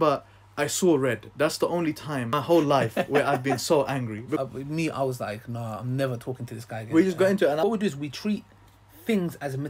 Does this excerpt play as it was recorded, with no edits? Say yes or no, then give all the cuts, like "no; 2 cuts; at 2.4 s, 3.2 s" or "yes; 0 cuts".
no; 3 cuts; at 2.3 s, 4.4 s, 7.6 s